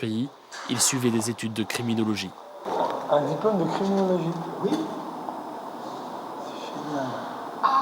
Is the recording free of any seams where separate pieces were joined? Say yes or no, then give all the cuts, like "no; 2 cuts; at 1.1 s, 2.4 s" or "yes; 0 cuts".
no; 1 cut; at 2.7 s